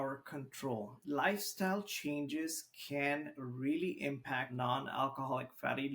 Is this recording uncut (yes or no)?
no